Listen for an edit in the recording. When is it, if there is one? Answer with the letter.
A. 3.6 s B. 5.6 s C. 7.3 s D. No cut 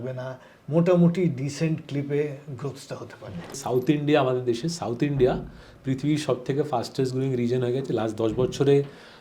A